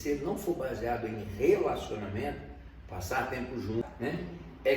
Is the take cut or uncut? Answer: cut